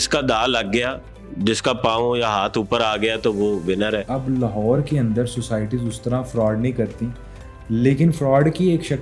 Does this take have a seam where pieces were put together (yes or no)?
yes